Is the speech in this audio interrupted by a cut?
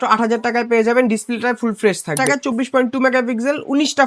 yes; 1 cut; at 2.2 s

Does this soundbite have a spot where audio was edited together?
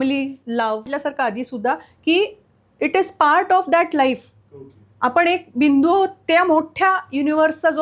yes; 1 cut; at 0.9 s

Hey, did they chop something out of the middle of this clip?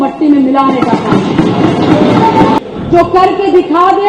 yes; 1 cut; at 2.6 s

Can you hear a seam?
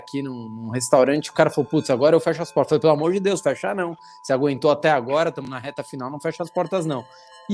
no; 0 cuts

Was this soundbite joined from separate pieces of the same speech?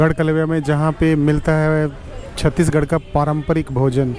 no; 0 cuts

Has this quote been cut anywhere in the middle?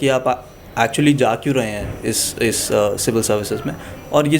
no; 0 cuts

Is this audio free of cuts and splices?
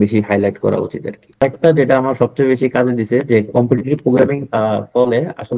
no; 2 cuts; at 1.4 s, 4.4 s

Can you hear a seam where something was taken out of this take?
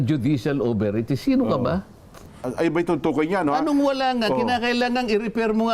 yes; 1 cut; at 2.5 s

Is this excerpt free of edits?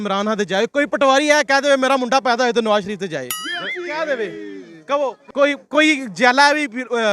no; 1 cut; at 5.3 s

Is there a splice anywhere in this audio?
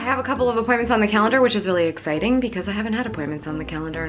no; 0 cuts

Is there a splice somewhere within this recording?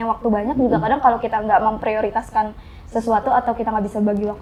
no; 0 cuts

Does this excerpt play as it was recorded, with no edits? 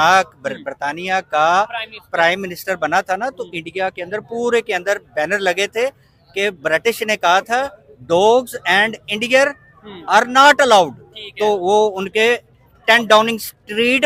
yes; 0 cuts

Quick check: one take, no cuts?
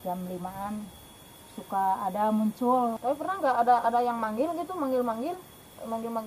no; 1 cut; at 3.0 s

